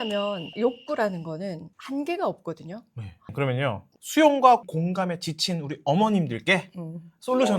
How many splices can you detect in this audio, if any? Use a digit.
2